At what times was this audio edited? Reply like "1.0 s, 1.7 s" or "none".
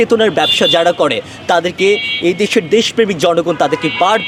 none